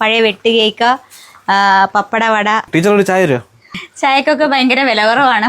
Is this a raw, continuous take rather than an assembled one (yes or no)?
no